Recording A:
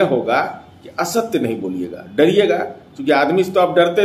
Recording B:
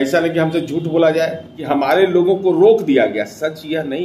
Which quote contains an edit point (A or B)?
B